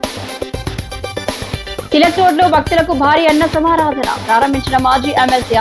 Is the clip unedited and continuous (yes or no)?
yes